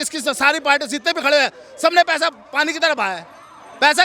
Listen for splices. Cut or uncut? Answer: uncut